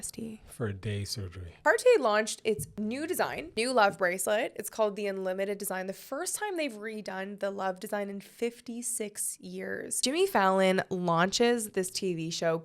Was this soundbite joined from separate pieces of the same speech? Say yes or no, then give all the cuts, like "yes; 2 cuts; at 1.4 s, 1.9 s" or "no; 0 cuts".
yes; 2 cuts; at 1.6 s, 10.0 s